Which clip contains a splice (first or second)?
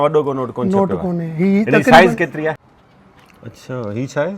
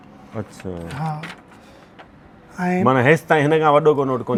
first